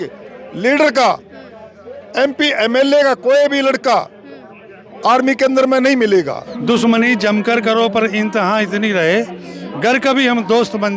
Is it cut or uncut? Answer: cut